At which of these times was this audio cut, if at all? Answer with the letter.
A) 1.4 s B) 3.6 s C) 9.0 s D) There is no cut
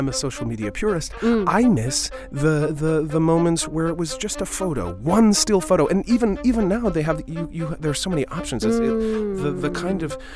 B